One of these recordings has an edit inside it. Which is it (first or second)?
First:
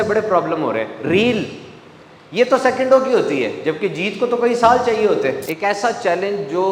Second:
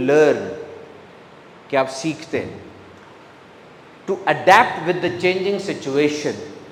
first